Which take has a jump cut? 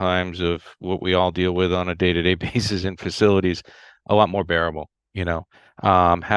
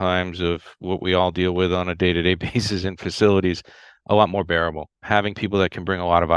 second; 1 cut; at 5.0 s

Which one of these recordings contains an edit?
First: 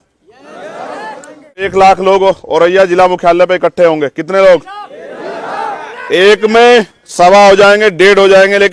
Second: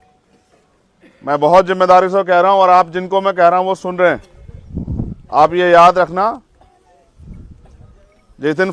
first; 1 cut; at 1.7 s

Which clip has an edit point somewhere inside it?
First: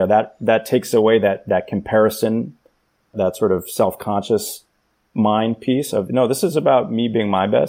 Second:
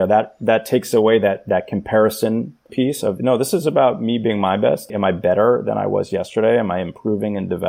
second; 2 cuts; at 2.7 s, 4.9 s

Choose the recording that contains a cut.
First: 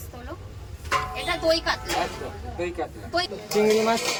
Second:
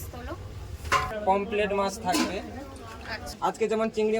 second; 2 cuts; at 1.2 s, 3.3 s

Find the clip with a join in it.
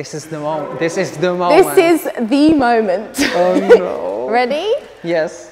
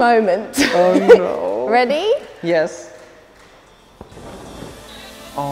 second; 1 cut; at 4.1 s

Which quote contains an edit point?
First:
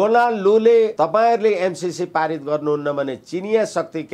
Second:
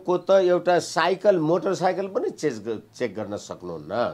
first; 1 cut; at 0.9 s

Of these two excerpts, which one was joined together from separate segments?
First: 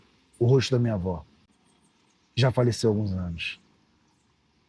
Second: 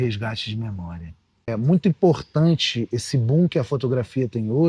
second; 1 cut; at 1.5 s

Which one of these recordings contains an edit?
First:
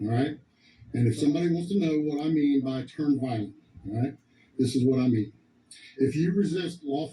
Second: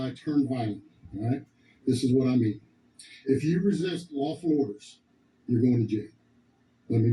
first; 1 cut; at 1.4 s

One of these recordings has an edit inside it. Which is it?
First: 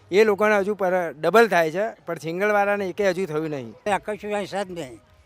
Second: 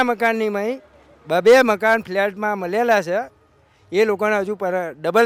first; 1 cut; at 3.8 s

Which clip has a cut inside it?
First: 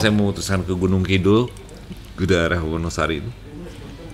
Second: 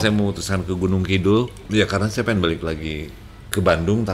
second; 1 cut; at 1.6 s

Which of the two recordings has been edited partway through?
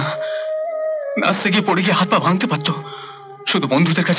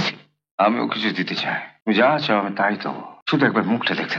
second; 2 cuts; at 1.7 s, 3.1 s

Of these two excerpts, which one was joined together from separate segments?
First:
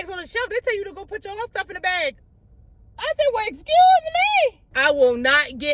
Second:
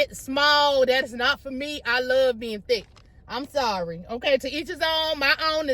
first; 1 cut; at 4.7 s

